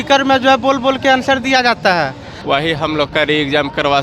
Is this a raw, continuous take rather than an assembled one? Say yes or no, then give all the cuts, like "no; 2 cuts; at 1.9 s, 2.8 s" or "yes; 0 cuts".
no; 1 cut; at 2.3 s